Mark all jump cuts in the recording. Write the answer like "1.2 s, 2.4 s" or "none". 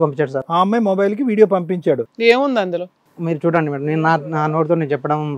2.1 s